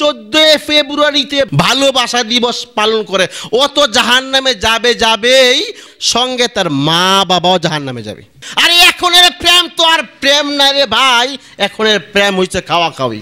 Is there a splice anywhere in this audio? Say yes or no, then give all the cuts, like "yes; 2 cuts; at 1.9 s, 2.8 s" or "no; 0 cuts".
yes; 2 cuts; at 5.8 s, 8.5 s